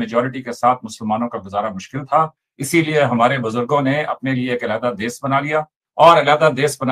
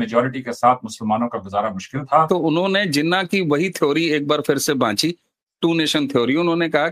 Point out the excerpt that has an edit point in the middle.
second; 1 cut; at 2.3 s

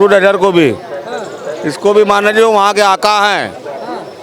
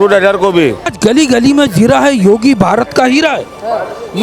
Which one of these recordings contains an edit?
second; 1 cut; at 0.9 s

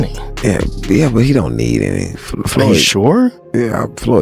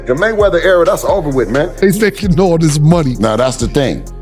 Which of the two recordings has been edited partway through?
second; 1 cut; at 1.8 s

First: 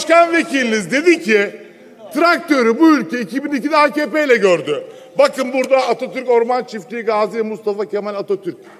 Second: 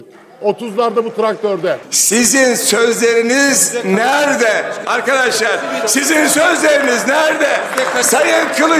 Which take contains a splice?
second; 1 cut; at 1.9 s

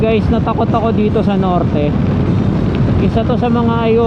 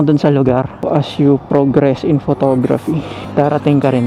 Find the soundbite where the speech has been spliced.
second; 2 cuts; at 0.8 s, 3.2 s

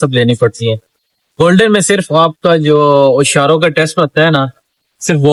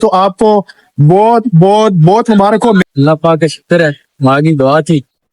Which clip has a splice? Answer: second; 1 cut; at 2.8 s

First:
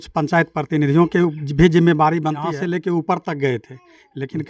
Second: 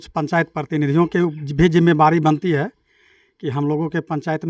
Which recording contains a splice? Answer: first; 1 cut; at 2.5 s

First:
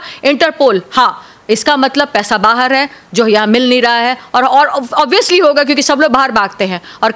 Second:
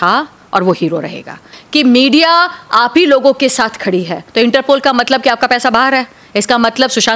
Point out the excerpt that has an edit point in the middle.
second; 2 cuts; at 1.5 s, 4.2 s

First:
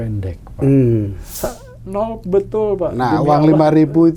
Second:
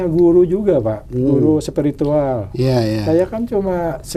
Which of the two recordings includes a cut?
first; 1 cut; at 1.3 s

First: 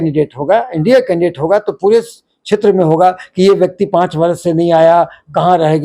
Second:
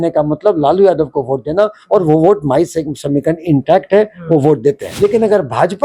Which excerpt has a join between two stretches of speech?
second; 1 cut; at 4.9 s

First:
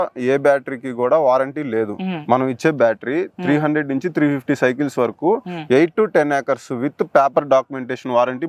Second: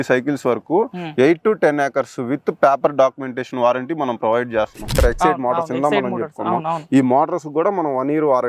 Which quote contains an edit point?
second; 1 cut; at 4.9 s

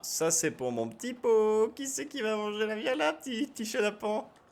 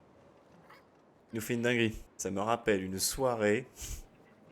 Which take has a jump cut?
second; 2 cuts; at 1.2 s, 2.1 s

